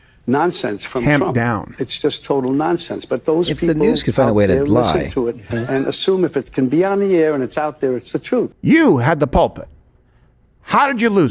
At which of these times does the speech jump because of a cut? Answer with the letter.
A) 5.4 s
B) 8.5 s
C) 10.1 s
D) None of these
B